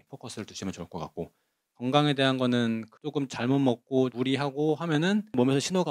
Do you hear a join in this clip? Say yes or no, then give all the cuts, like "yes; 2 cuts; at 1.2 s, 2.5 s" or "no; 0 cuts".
yes; 2 cuts; at 1.7 s, 2.9 s